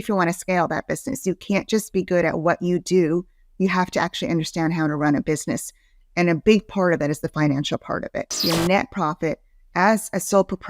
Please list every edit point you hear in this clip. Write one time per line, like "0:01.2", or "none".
0:08.4